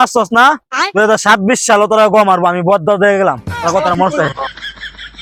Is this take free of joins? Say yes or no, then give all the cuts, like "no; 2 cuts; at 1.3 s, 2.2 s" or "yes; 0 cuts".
yes; 0 cuts